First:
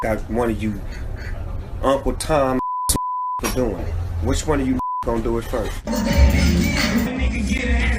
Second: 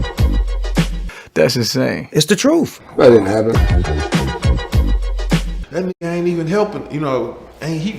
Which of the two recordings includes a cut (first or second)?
second